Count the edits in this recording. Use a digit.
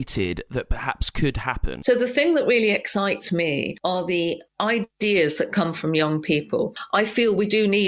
2